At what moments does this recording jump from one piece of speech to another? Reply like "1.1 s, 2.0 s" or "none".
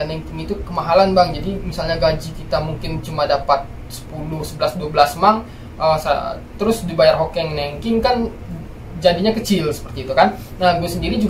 none